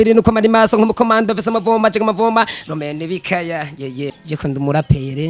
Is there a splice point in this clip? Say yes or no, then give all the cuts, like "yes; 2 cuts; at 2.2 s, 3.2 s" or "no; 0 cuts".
yes; 1 cut; at 4.2 s